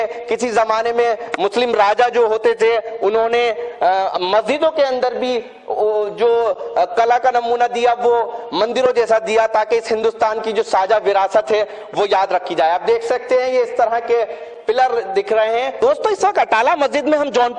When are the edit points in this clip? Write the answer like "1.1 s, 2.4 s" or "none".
15.8 s